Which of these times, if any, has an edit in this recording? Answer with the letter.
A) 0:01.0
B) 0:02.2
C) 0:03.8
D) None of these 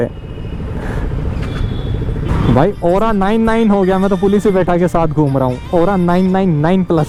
D